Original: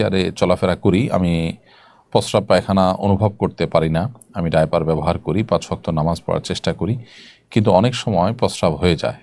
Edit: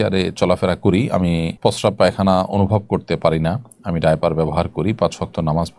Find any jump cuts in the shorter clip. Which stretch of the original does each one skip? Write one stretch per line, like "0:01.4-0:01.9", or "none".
0:01.5-0:02.0